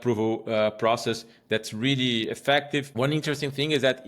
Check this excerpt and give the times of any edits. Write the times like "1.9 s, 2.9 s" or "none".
2.9 s